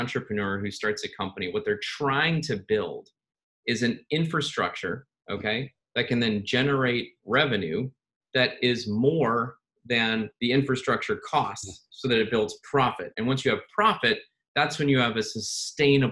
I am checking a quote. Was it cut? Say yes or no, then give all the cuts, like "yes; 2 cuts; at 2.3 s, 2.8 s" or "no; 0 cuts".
no; 0 cuts